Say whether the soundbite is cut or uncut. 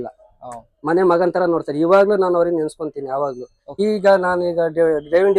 cut